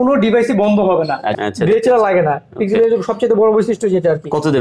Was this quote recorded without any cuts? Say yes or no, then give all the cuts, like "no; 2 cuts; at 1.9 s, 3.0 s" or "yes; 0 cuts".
no; 1 cut; at 1.3 s